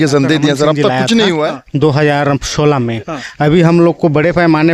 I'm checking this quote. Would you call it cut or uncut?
cut